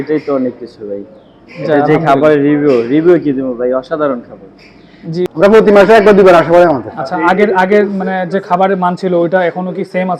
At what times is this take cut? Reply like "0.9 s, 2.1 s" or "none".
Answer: 5.3 s